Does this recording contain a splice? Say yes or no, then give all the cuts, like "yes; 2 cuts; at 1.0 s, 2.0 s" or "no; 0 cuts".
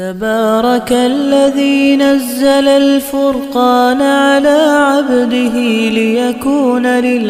no; 0 cuts